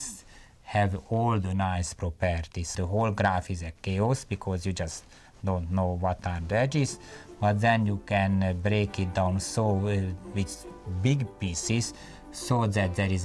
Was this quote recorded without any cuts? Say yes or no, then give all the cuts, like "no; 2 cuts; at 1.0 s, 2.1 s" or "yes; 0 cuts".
no; 1 cut; at 2.7 s